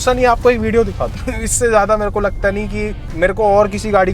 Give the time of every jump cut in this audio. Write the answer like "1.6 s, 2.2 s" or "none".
1.1 s, 3.0 s